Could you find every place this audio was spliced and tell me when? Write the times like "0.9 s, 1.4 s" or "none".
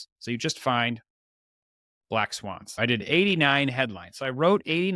2.7 s